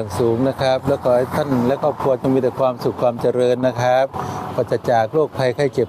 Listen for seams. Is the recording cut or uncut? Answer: uncut